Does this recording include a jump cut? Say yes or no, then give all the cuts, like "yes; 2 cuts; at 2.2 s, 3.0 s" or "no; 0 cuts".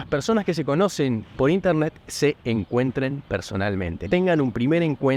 yes; 1 cut; at 4.1 s